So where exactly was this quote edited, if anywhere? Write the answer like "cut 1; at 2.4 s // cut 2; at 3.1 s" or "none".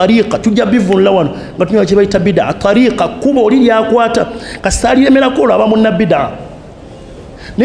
none